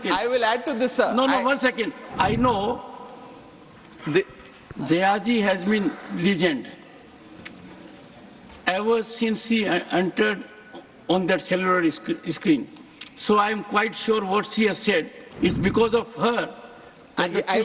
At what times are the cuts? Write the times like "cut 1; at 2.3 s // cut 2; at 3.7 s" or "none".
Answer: cut 1; at 2.0 s // cut 2; at 15.2 s